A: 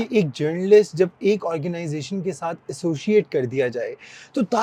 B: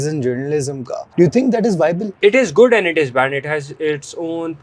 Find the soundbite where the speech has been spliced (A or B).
B